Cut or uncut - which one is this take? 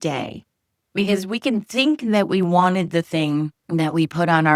cut